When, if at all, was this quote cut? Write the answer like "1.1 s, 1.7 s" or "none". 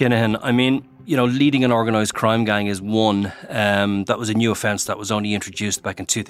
0.9 s